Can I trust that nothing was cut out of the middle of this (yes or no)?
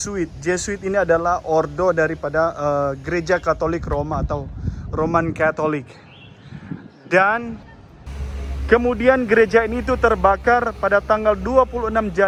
yes